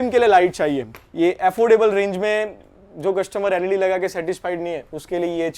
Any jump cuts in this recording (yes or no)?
yes